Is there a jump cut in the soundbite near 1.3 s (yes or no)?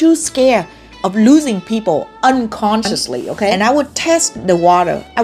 no